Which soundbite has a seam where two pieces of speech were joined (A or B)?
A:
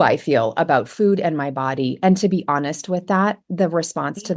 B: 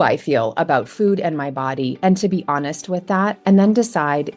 B